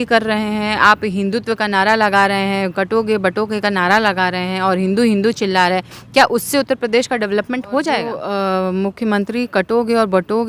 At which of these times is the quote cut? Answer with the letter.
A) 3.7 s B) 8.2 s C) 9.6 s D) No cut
B